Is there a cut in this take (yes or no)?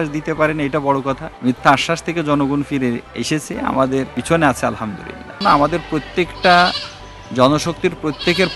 yes